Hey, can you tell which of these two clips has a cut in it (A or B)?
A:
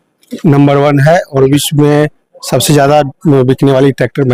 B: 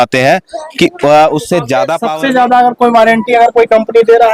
B